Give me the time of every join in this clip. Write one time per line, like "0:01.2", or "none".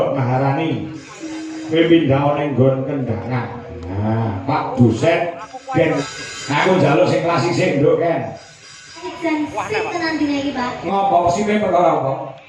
0:06.0
0:09.1